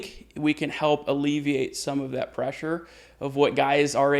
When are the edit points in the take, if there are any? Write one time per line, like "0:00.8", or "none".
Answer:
none